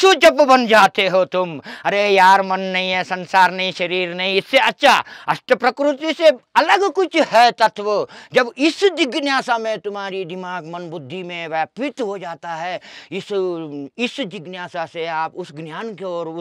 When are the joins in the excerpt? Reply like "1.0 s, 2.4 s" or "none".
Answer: none